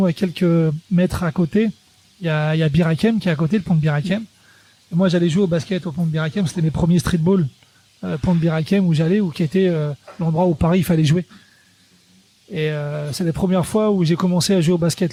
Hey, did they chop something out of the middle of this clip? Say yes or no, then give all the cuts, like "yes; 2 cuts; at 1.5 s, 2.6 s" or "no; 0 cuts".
no; 0 cuts